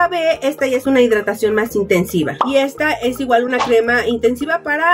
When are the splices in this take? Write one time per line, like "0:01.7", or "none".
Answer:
none